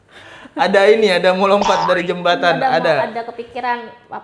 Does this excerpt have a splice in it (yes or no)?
no